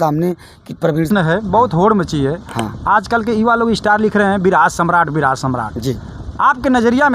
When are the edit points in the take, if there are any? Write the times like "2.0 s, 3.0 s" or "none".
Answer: 1.1 s